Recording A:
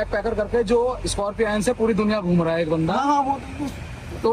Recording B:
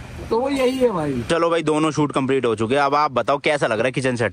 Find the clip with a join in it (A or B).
B